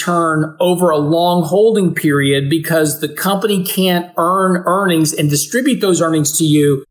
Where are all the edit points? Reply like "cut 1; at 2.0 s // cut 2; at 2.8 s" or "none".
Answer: none